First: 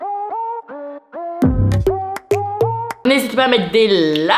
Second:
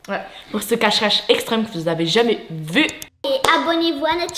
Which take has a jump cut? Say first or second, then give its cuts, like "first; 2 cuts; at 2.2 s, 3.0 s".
first; 1 cut; at 3.0 s